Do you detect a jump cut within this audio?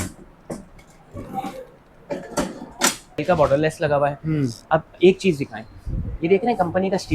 yes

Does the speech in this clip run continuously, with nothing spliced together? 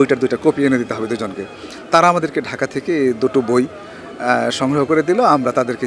yes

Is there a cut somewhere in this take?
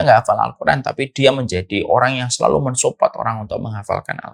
no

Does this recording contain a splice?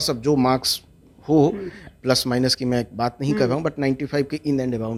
no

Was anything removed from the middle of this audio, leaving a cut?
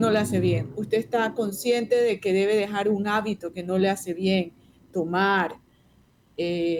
no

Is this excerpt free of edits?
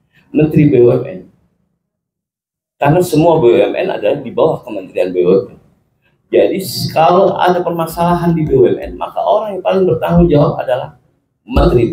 yes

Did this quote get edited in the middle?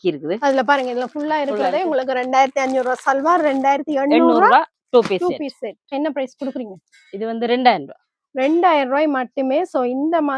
yes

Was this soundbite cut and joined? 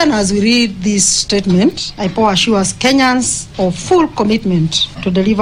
no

